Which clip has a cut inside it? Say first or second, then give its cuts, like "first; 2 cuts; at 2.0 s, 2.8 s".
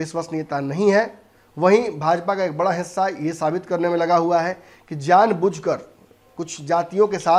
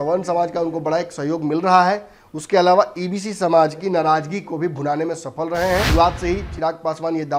second; 1 cut; at 5.9 s